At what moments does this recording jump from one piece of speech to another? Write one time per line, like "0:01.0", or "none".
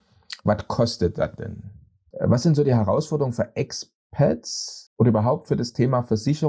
0:02.0